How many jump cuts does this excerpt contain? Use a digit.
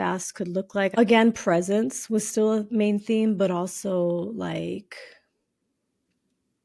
1